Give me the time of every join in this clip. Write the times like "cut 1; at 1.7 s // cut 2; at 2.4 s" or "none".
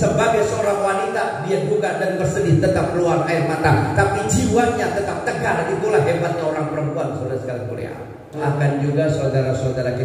cut 1; at 8.4 s